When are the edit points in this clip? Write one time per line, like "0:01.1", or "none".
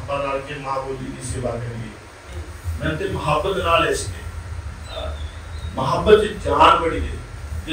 0:02.3